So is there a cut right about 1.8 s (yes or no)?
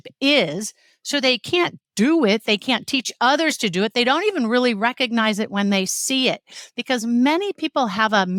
no